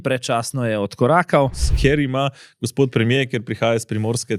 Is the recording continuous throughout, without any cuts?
no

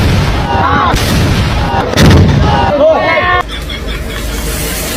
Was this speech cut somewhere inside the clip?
no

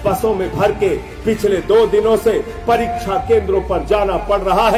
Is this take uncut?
yes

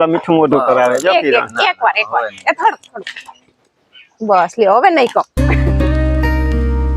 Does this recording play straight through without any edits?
no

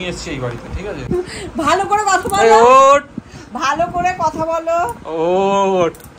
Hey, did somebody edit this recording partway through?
yes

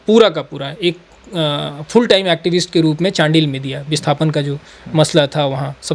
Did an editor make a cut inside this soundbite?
no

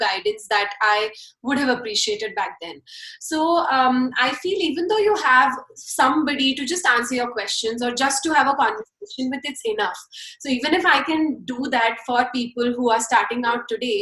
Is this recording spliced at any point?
no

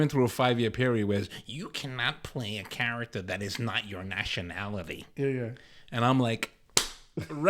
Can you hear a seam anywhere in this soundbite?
no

